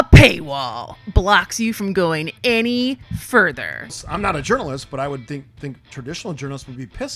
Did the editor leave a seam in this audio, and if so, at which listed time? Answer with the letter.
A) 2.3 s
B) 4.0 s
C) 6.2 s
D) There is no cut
B